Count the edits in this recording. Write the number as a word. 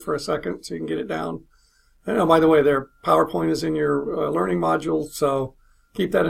one